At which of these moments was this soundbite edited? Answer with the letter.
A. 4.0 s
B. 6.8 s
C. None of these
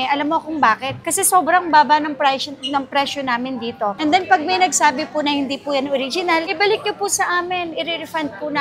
A